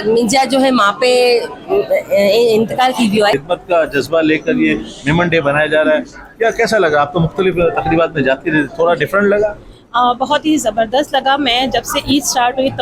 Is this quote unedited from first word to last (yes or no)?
no